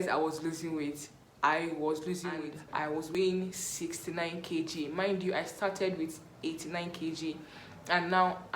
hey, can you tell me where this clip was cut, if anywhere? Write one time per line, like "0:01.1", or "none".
0:03.0